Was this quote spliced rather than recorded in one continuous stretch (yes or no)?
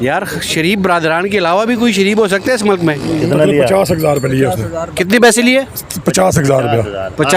yes